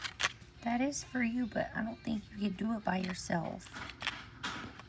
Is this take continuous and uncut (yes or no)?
yes